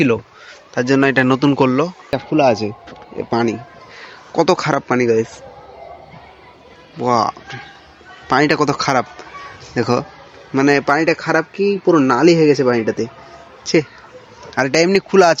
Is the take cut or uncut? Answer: cut